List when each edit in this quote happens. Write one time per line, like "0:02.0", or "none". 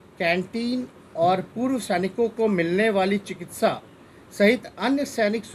none